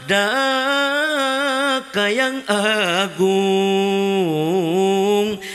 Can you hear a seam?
no; 0 cuts

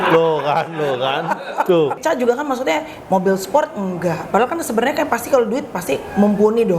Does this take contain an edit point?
yes; 1 cut; at 2.0 s

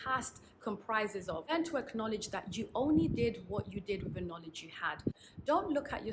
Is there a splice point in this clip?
yes; 2 cuts; at 1.5 s, 5.1 s

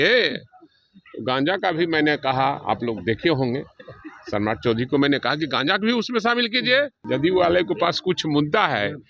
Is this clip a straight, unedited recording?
no; 1 cut; at 7.0 s

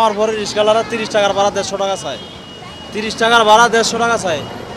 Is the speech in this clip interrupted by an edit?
no; 0 cuts

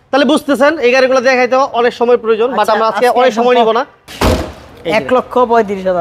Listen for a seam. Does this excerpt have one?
yes; 1 cut; at 4.0 s

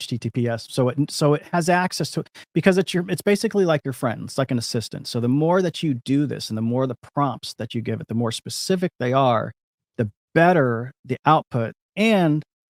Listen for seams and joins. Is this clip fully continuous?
yes; 0 cuts

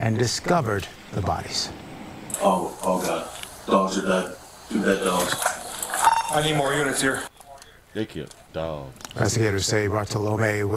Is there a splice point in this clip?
no; 0 cuts

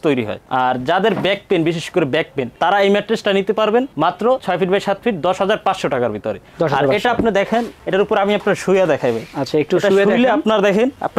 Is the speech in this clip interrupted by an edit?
no; 0 cuts

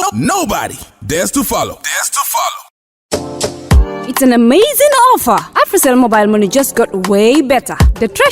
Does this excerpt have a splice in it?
yes; 1 cut; at 2.6 s

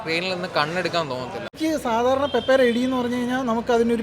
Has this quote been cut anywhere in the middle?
yes; 1 cut; at 1.5 s

